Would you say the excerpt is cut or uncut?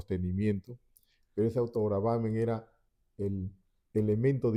uncut